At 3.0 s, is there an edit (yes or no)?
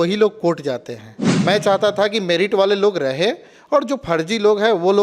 no